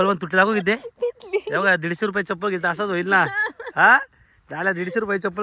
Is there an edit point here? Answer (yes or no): no